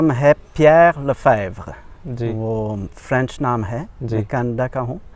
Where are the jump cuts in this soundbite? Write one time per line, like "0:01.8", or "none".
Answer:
none